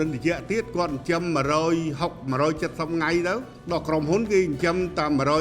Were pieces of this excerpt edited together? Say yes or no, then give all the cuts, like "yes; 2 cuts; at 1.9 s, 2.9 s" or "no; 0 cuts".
yes; 1 cut; at 3.5 s